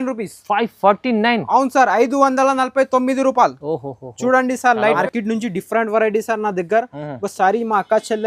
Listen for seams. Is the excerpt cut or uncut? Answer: cut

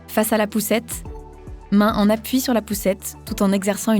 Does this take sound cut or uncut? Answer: uncut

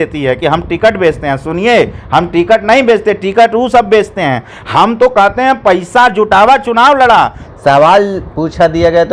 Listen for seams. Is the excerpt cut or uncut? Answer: cut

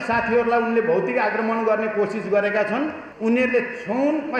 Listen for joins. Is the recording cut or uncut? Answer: cut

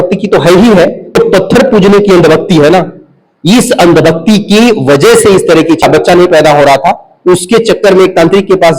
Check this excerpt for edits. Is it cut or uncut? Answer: cut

